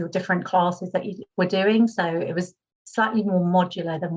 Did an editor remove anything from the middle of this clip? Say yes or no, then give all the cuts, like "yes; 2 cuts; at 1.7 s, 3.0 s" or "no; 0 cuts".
yes; 1 cut; at 1.2 s